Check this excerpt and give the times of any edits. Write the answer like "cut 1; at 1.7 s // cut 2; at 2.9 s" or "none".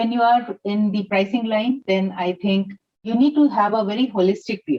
cut 1; at 1.1 s // cut 2; at 3.1 s

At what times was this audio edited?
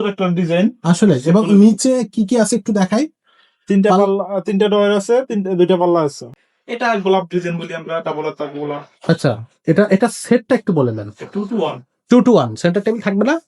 cut 1; at 6.4 s

